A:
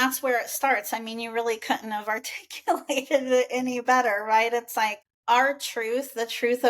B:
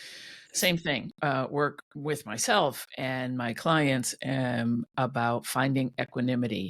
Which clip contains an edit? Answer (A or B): A